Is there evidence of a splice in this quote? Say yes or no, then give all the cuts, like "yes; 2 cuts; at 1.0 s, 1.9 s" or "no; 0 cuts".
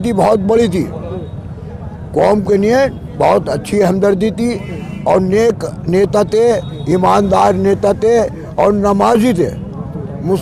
no; 0 cuts